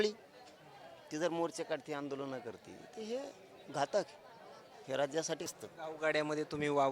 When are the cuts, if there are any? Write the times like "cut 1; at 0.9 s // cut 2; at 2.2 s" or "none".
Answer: cut 1; at 5.5 s